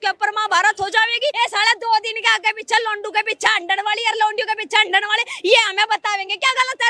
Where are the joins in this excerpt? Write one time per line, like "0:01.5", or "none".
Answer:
0:01.3